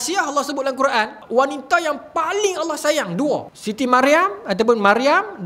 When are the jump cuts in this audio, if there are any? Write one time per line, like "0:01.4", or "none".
0:01.2
0:03.6